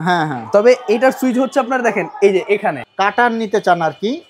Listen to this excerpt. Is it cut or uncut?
cut